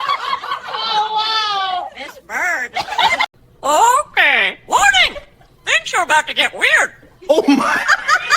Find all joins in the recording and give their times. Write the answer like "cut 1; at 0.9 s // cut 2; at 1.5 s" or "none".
cut 1; at 3.3 s